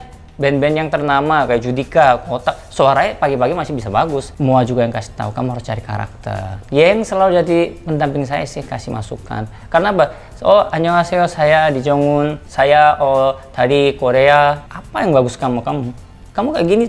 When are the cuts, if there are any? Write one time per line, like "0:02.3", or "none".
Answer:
0:04.3
0:12.4
0:14.8